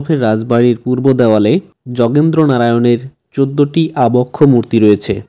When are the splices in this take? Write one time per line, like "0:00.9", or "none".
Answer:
none